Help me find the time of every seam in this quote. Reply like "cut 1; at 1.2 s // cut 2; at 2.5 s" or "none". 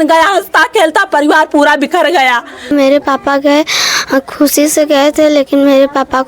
cut 1; at 2.7 s